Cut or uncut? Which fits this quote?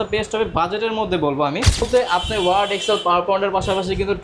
cut